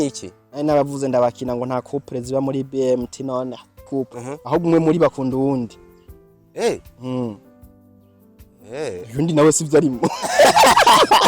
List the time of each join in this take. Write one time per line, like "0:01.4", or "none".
0:03.8